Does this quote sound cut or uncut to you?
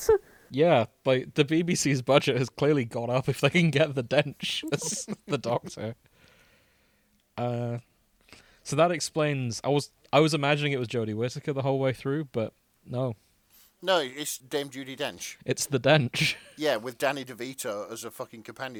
uncut